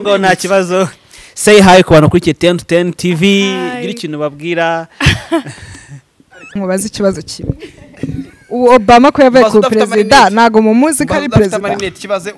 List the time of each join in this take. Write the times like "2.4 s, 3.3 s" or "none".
6.6 s